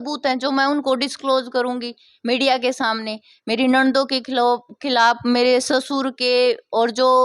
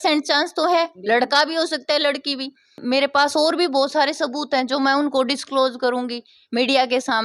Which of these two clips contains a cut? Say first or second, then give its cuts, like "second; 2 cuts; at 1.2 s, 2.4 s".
second; 1 cut; at 2.8 s